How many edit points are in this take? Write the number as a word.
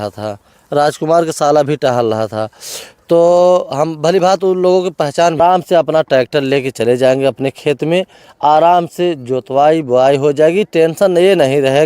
one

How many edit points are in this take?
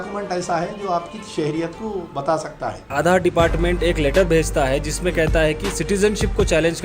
one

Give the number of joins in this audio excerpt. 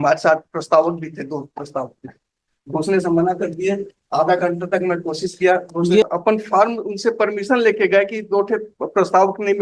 one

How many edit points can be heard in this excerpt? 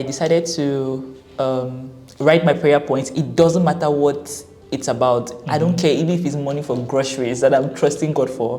zero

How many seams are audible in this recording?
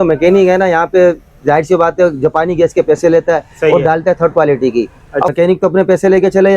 one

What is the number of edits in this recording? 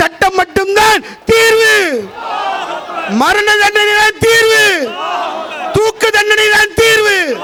zero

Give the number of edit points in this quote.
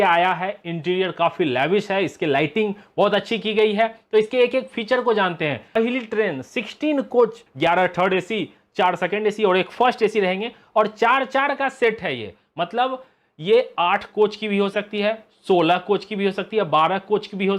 one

